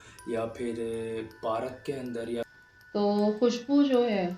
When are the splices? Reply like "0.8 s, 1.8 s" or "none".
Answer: 2.5 s